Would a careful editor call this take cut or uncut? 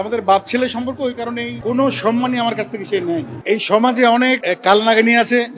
cut